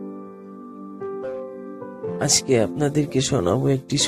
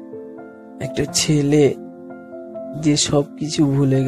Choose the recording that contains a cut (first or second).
first